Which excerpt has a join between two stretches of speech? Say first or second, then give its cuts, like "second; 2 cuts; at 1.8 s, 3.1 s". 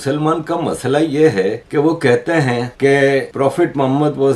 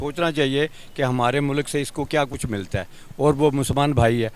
first; 3 cuts; at 1.6 s, 2.7 s, 3.3 s